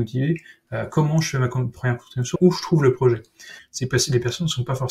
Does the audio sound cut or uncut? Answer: cut